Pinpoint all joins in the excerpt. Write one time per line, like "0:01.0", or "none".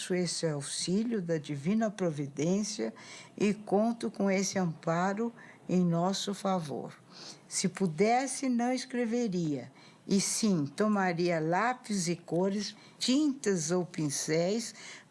0:12.9